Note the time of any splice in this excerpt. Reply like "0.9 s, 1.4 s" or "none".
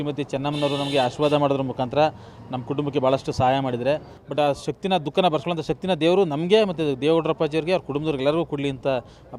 4.2 s